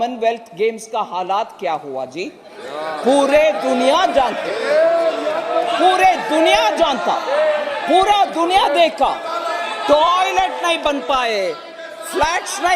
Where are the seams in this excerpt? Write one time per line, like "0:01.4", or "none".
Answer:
none